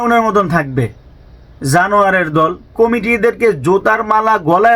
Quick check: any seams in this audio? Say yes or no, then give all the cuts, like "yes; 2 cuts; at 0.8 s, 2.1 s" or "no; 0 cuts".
yes; 1 cut; at 2.7 s